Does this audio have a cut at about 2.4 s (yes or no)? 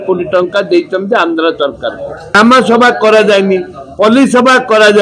yes